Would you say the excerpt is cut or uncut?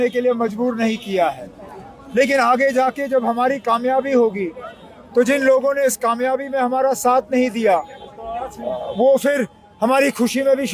uncut